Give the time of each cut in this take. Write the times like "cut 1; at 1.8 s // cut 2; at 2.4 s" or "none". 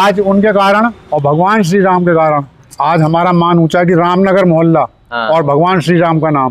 cut 1; at 1.0 s // cut 2; at 2.6 s